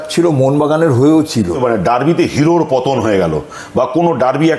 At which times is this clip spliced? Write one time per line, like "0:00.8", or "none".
0:01.6